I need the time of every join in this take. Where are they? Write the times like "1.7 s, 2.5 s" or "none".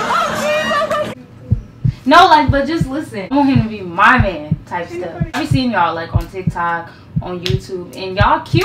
3.3 s, 5.4 s